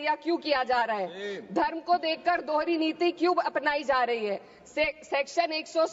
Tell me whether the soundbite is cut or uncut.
uncut